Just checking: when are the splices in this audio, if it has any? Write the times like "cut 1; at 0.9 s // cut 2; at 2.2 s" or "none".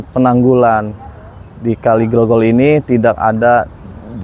none